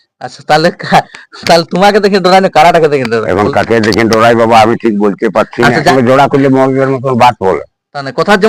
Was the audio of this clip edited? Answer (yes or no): yes